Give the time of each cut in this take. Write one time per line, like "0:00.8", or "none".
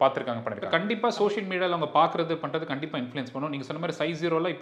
0:00.9